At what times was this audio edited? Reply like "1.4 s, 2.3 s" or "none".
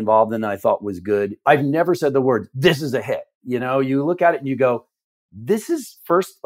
1.4 s